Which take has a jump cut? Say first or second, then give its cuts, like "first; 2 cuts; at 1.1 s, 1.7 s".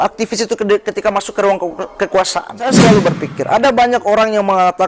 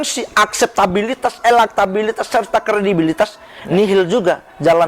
first; 1 cut; at 2.7 s